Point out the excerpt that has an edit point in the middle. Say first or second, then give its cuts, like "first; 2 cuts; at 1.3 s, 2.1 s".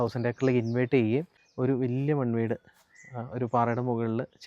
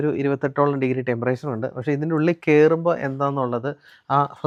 first; 1 cut; at 1.4 s